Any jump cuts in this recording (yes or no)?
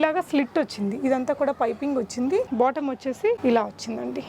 yes